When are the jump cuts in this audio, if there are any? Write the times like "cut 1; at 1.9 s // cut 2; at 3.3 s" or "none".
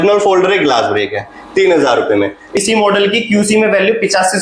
cut 1; at 2.5 s